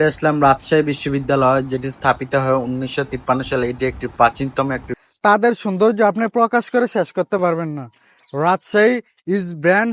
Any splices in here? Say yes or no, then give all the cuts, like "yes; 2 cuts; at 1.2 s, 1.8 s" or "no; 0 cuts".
yes; 1 cut; at 5.0 s